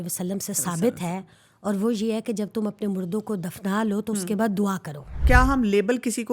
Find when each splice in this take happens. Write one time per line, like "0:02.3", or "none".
0:05.2